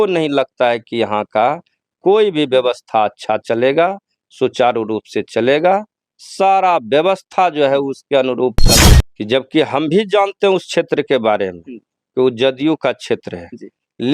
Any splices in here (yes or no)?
yes